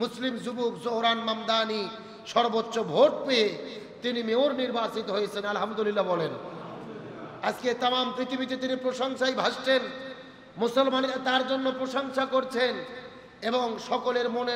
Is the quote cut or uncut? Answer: uncut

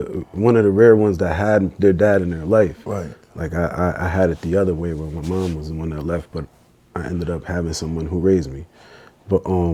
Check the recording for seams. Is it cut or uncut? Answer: uncut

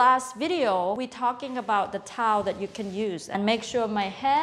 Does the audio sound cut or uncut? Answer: cut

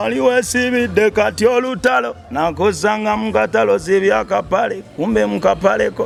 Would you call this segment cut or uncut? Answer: uncut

